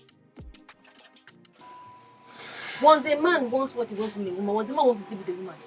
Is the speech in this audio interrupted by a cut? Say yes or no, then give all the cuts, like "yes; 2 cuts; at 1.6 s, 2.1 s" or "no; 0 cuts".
yes; 1 cut; at 1.6 s